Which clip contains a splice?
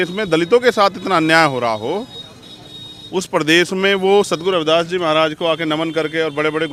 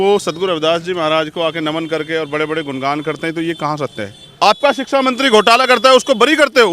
second; 1 cut; at 4.2 s

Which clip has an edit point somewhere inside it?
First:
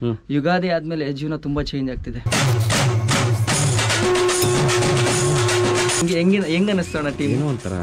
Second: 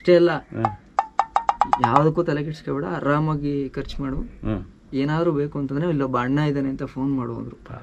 first; 2 cuts; at 2.2 s, 6.0 s

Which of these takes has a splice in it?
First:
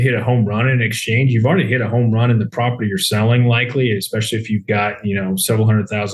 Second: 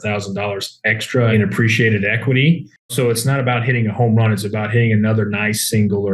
second; 2 cuts; at 1.3 s, 2.9 s

